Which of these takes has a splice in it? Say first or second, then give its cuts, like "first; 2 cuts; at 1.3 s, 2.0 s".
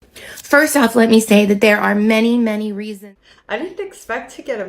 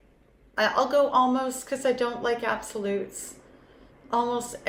first; 1 cut; at 2.8 s